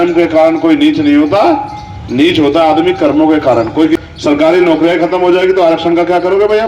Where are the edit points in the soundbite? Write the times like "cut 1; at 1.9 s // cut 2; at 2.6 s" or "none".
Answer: cut 1; at 4.0 s

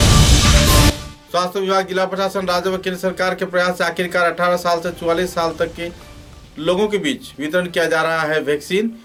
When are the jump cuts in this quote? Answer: none

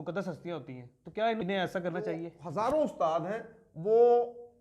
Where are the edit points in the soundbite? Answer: cut 1; at 1.4 s // cut 2; at 2.3 s

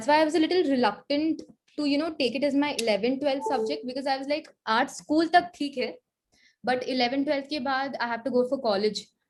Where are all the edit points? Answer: none

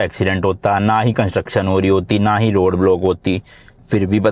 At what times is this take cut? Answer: none

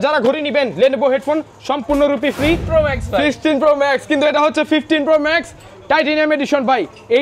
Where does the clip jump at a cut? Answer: cut 1; at 2.6 s

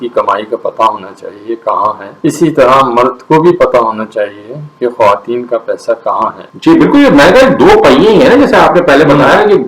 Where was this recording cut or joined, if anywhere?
none

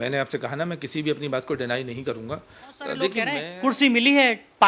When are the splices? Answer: cut 1; at 3.4 s

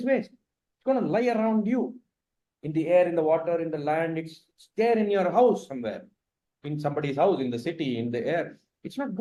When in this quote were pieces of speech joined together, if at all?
none

